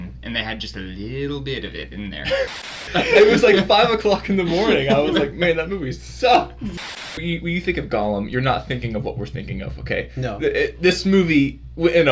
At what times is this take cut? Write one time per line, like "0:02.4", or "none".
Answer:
0:02.8
0:06.8